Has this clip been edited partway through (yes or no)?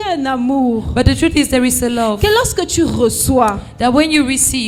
no